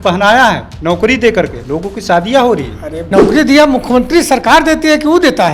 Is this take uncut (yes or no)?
no